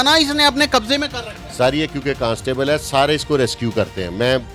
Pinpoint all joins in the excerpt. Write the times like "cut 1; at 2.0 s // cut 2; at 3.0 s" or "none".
none